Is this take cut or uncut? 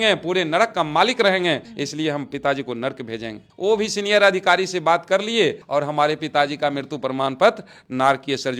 uncut